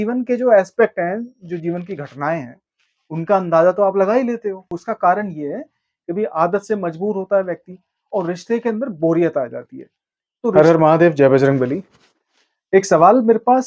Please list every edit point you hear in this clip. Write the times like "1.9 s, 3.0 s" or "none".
4.7 s, 10.5 s